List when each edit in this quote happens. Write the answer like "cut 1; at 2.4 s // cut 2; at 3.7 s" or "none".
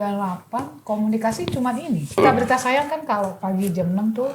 cut 1; at 2.2 s

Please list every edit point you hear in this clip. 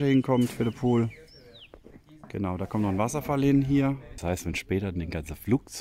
cut 1; at 4.1 s

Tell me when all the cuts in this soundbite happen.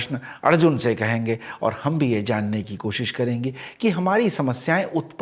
none

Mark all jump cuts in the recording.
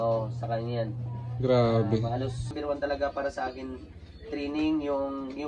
cut 1; at 2.6 s

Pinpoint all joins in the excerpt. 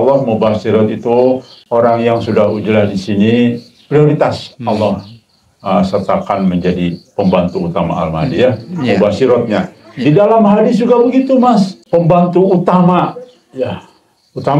cut 1; at 1.5 s // cut 2; at 11.8 s

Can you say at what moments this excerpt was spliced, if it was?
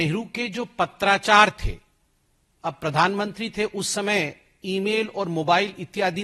none

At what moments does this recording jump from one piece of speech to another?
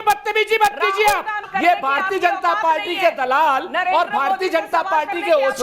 cut 1; at 1.4 s

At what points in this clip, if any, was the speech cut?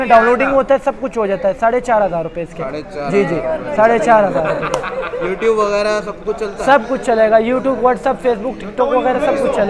none

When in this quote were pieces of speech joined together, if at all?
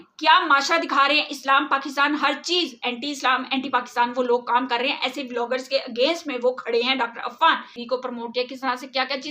cut 1; at 7.8 s

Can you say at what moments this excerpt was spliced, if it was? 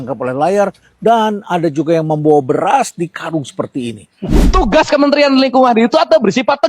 cut 1; at 4.4 s

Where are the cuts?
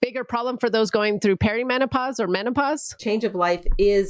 cut 1; at 2.9 s

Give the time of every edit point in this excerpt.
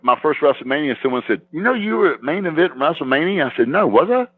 cut 1; at 1.5 s

